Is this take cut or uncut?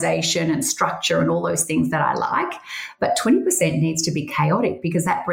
uncut